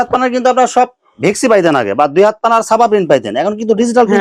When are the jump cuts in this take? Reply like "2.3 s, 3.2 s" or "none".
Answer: none